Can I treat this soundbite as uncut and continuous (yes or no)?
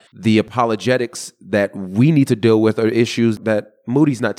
no